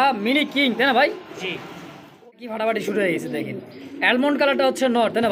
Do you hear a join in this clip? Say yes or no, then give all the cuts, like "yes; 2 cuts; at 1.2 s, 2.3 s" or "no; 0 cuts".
yes; 1 cut; at 2.3 s